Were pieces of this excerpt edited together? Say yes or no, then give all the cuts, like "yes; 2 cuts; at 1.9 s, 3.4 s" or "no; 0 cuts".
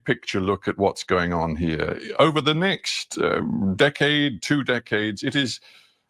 yes; 1 cut; at 2.0 s